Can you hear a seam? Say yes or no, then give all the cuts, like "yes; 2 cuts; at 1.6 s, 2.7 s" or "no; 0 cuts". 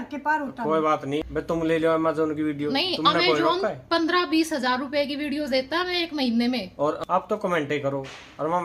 yes; 2 cuts; at 1.2 s, 7.0 s